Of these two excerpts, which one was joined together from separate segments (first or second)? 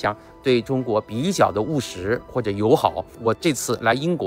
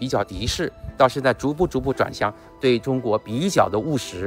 first